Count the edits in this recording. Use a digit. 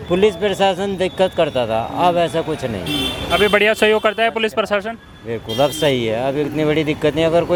0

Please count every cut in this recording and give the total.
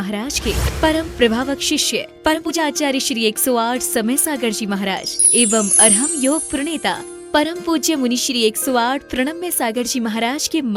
1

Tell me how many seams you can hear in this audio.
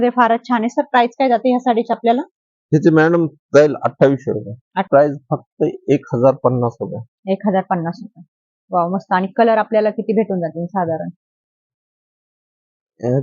1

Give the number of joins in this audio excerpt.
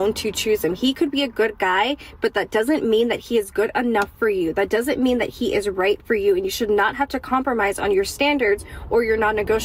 3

